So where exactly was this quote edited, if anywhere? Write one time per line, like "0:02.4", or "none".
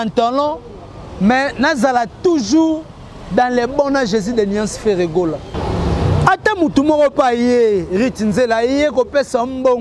0:05.5